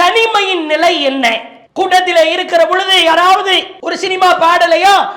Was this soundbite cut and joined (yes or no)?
no